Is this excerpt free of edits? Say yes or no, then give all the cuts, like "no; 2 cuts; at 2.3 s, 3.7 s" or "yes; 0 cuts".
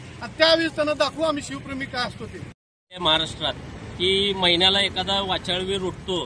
no; 1 cut; at 3.0 s